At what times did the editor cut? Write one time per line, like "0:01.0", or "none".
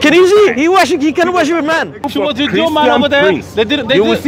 0:02.1